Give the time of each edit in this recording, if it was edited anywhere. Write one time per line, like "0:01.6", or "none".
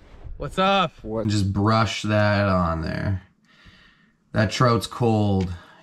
0:01.2

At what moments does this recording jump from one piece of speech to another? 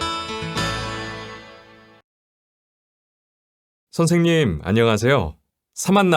0:01.3

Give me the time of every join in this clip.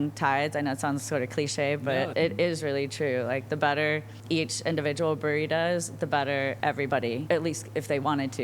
0:01.9
0:04.1
0:06.8

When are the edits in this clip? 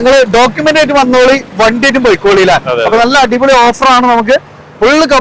none

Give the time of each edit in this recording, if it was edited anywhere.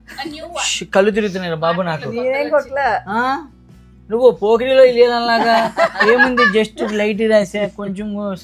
none

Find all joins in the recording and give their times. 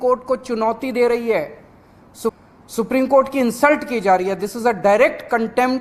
0:02.4

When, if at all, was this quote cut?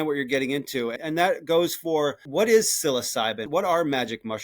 0:01.0
0:02.3
0:03.5

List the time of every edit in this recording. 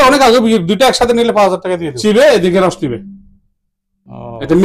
0:02.0

